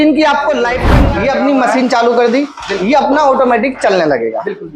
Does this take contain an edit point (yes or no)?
yes